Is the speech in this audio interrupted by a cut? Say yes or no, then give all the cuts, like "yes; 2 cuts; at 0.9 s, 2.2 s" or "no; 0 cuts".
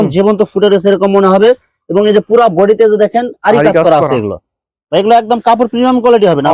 no; 0 cuts